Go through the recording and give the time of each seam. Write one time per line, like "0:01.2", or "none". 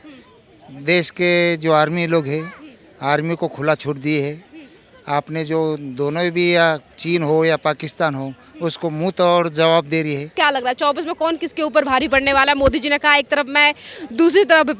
0:10.3